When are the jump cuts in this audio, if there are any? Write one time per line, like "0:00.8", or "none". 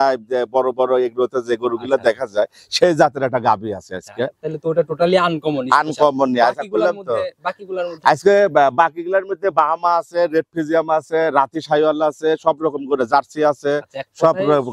none